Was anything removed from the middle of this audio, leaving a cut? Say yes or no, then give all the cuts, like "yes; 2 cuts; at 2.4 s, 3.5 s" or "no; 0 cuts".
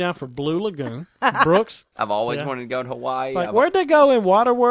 yes; 1 cut; at 1.9 s